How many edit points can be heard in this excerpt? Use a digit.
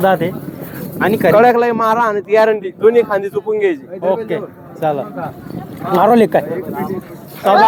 0